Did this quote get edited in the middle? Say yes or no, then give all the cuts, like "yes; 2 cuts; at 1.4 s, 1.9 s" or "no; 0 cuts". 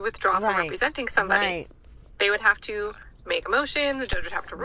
yes; 1 cut; at 1.6 s